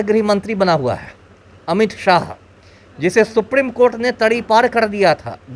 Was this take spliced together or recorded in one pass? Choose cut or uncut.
uncut